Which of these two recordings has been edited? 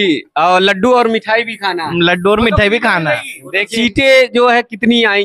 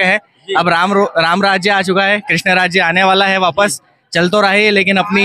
first; 1 cut; at 3.7 s

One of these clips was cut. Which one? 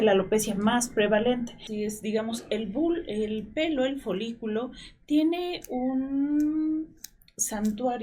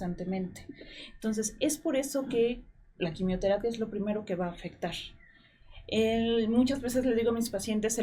first; 1 cut; at 1.6 s

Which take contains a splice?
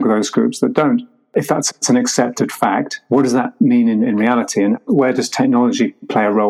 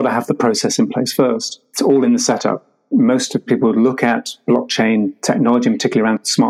first; 1 cut; at 1.2 s

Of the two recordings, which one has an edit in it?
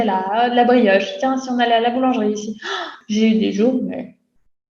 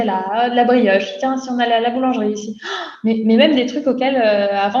first; 1 cut; at 2.8 s

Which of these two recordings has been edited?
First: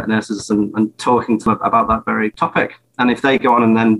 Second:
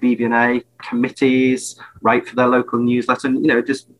first; 2 cuts; at 1.4 s, 2.3 s

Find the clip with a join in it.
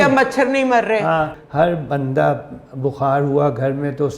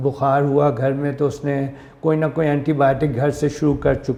first; 1 cut; at 1.3 s

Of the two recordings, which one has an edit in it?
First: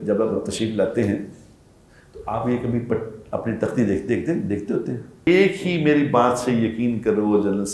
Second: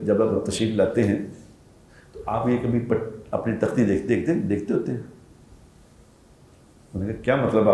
first; 1 cut; at 5.3 s

